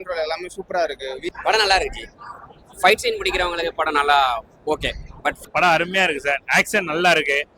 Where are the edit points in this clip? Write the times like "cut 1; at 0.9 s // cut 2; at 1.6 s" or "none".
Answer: cut 1; at 1.3 s // cut 2; at 5.4 s